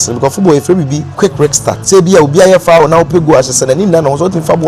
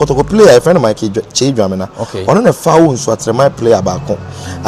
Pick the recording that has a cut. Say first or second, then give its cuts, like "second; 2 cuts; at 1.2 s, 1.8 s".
first; 1 cut; at 1.4 s